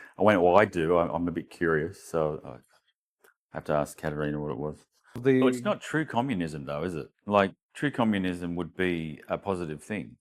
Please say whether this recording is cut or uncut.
cut